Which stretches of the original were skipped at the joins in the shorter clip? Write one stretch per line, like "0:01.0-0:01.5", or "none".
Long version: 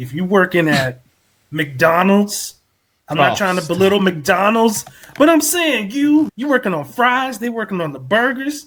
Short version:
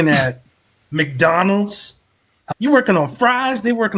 0:03.1-0:06.3

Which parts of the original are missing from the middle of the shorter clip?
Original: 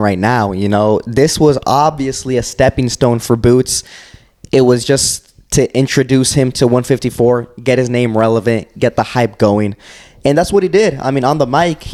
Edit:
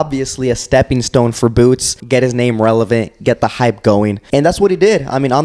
0:03.8-0:07.5
0:09.8-0:10.1

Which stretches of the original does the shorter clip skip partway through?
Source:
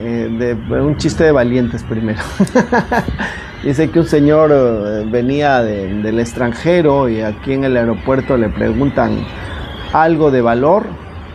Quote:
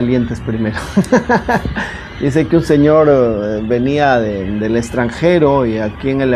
none

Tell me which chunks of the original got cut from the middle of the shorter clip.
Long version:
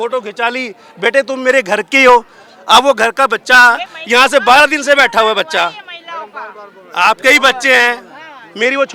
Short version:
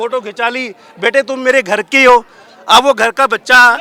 none

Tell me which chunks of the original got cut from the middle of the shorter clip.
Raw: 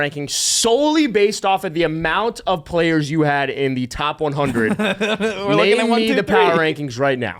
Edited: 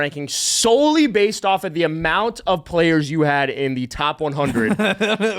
none

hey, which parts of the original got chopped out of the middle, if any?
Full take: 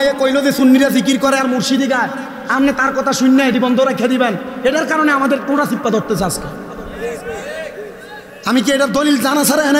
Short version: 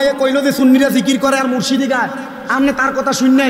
none

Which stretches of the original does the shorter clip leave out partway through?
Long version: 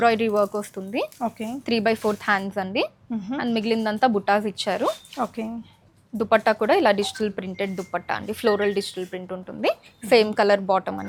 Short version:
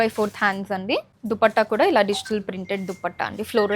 0:03.0-0:06.0

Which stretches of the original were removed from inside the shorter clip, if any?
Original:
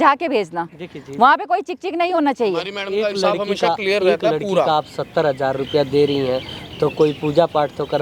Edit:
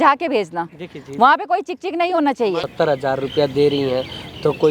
0:02.7-0:05.0

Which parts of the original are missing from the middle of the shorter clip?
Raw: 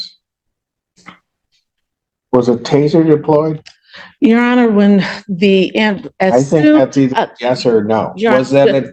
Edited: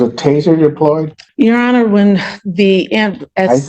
0:03.6-0:04.0

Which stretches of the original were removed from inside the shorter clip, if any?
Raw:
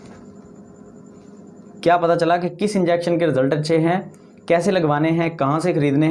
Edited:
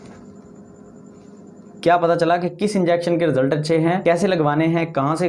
0:04.0-0:04.4

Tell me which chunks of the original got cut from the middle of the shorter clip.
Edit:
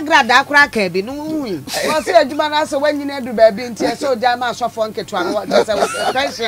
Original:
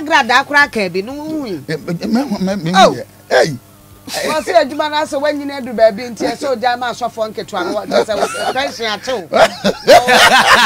0:01.6-0:04.0

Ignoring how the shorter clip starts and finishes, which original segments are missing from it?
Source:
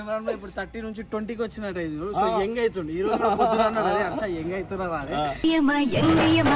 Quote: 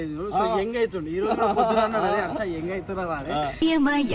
none

